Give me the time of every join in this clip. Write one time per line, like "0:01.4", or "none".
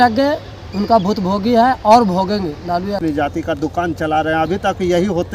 0:03.0